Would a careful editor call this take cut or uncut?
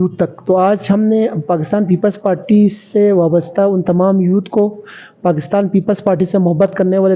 uncut